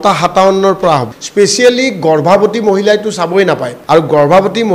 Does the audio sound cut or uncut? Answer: cut